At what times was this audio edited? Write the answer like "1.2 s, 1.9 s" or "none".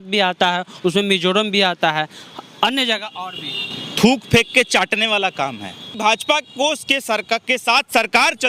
5.9 s